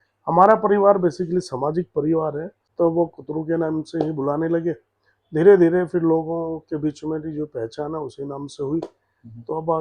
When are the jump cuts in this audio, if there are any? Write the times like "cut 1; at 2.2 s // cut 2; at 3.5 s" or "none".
cut 1; at 2.6 s